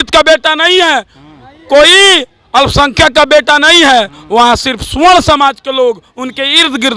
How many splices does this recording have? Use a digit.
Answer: 0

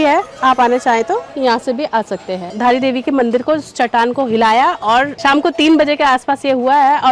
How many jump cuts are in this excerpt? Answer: 1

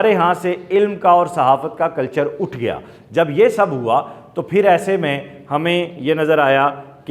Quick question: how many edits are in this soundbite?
0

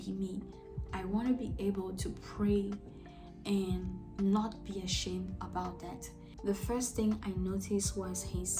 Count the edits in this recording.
1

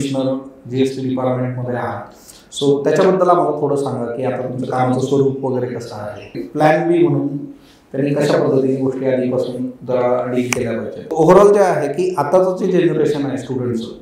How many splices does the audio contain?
2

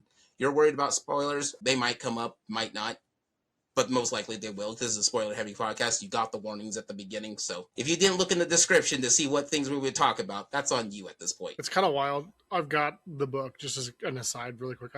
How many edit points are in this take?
2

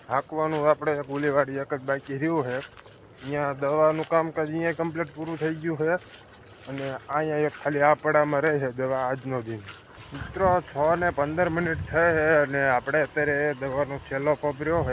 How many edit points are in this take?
0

